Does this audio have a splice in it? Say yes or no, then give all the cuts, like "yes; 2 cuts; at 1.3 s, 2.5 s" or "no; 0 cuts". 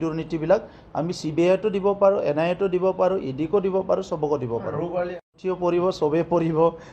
yes; 1 cut; at 5.2 s